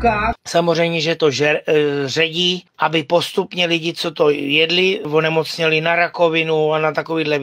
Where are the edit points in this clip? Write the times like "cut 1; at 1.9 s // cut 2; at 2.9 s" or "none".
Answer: cut 1; at 5.1 s